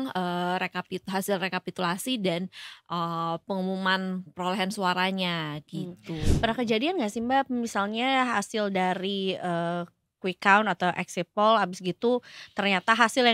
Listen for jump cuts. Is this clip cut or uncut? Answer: uncut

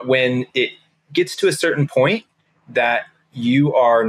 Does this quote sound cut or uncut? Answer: uncut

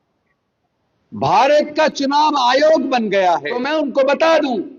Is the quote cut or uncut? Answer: cut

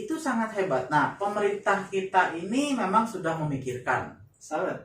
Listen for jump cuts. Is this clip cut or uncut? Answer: cut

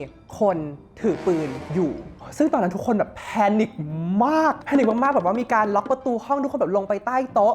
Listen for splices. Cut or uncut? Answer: uncut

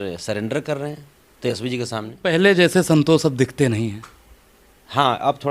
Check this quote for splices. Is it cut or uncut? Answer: cut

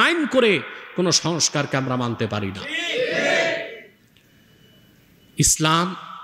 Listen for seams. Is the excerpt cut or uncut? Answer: uncut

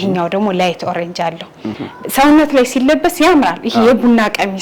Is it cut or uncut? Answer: cut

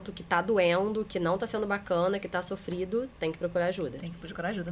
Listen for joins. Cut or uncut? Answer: uncut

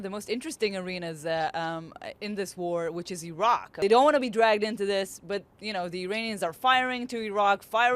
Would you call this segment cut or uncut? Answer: cut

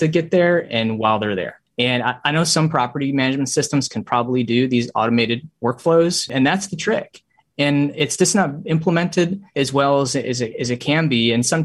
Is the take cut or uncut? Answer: cut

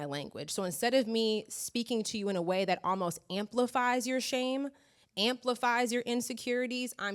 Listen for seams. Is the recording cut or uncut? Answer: uncut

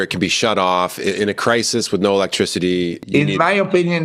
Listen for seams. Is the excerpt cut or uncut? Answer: uncut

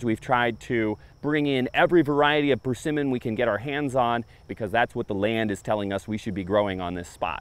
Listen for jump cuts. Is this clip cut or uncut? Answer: cut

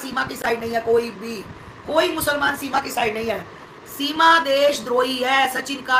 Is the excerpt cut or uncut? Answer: uncut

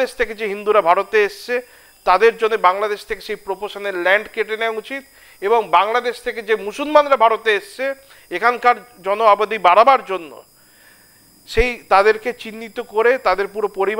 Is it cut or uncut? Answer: uncut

